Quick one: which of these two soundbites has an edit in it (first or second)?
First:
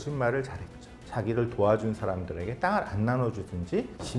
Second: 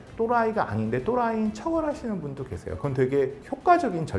first